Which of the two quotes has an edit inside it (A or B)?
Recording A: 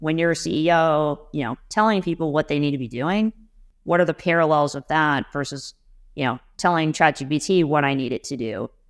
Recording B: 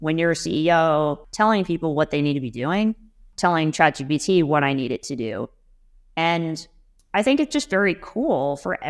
B